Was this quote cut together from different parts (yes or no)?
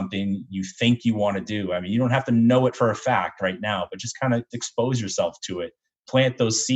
yes